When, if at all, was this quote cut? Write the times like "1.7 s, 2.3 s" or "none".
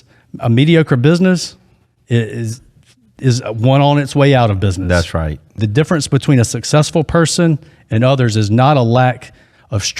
5.6 s